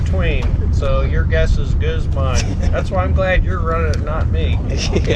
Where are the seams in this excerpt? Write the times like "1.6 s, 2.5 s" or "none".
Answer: none